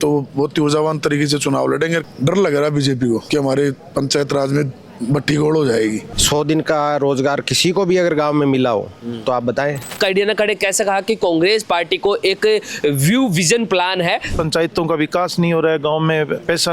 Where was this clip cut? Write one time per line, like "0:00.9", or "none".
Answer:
0:02.0
0:03.2
0:06.1
0:09.9
0:14.3